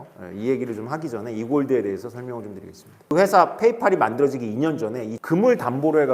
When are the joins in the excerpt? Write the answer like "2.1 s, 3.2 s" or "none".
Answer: 3.1 s, 5.1 s

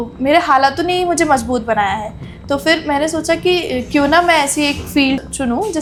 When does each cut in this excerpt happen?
none

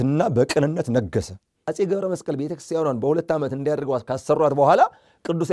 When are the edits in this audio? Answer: 1.6 s

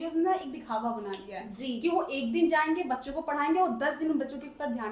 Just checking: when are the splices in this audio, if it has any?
none

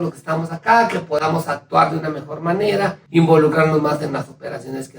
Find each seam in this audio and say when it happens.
3.0 s

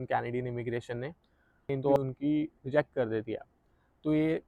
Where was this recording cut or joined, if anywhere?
2.0 s

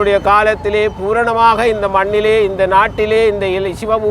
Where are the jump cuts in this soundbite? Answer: none

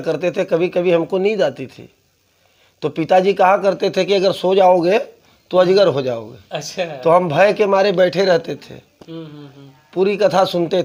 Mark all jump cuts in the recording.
none

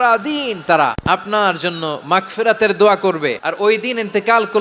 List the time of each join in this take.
1.0 s, 3.4 s

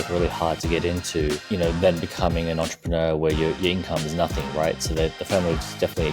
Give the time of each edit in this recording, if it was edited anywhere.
1.4 s

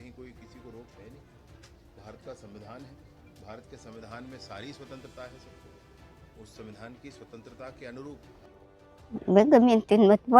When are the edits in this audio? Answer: 8.5 s

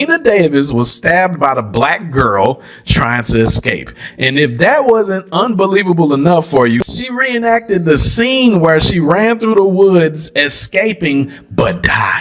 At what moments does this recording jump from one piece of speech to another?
6.8 s

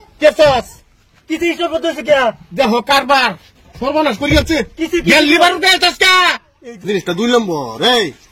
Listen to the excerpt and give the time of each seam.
6.8 s

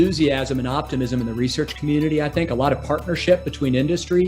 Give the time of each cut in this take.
none

